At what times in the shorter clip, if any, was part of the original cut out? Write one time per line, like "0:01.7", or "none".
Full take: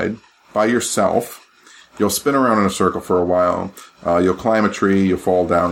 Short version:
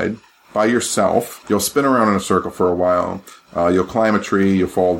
0:01.4

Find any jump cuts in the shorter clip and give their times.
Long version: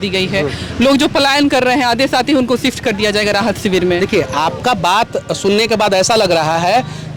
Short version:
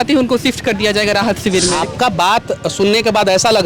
0:01.7

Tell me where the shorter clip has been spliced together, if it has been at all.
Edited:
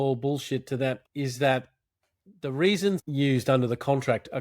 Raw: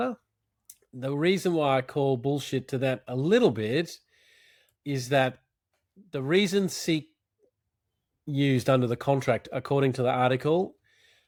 0:01.0
0:03.1

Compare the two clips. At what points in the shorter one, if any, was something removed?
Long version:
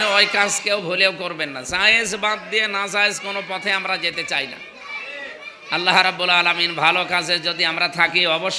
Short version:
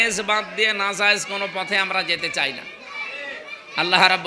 none

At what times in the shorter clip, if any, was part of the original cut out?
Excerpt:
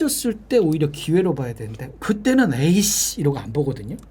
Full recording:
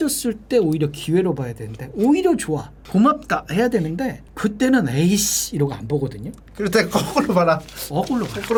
0:01.8

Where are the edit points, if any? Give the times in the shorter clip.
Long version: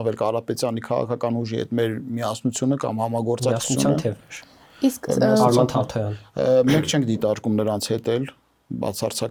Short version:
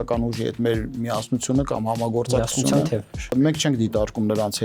0:03.3

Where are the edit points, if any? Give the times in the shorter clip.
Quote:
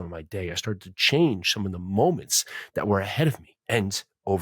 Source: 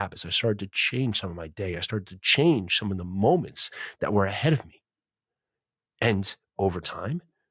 0:03.5

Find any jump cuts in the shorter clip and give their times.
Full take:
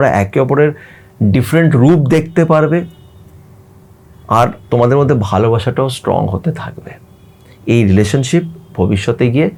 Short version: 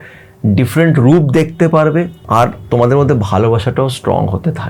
0:02.2

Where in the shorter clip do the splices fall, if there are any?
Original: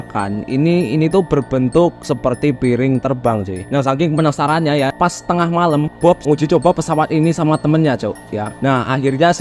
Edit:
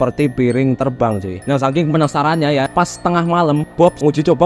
none

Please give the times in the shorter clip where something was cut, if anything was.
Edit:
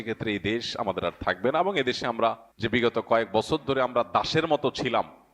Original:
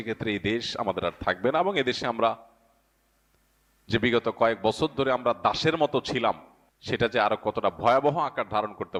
0:02.5

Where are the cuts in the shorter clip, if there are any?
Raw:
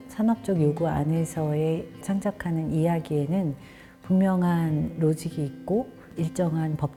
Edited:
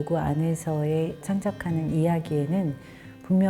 0:01.2

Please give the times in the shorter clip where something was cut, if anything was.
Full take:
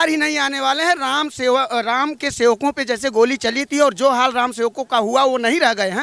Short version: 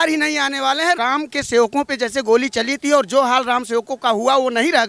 0:01.0

